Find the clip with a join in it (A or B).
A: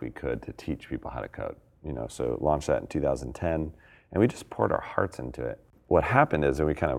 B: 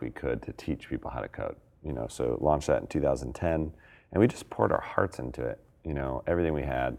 A